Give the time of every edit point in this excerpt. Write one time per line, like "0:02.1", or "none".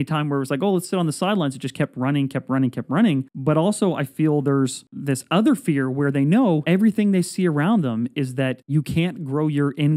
0:03.3
0:04.9
0:06.6
0:08.6